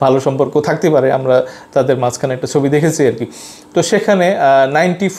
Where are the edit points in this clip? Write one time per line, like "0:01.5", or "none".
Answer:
none